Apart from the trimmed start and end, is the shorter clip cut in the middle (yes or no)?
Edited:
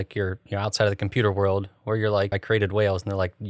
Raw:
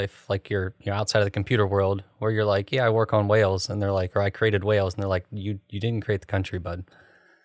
yes